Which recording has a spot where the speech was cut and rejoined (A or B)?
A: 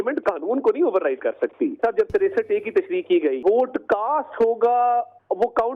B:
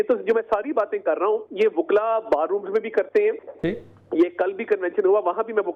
A